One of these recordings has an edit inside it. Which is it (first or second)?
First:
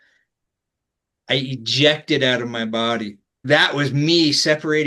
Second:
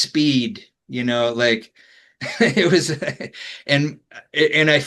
first